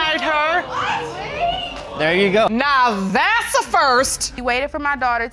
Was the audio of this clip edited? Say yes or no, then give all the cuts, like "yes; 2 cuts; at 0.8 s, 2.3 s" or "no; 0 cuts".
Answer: yes; 1 cut; at 4.3 s